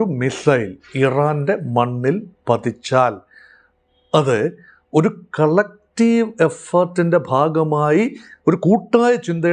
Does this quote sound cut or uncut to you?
uncut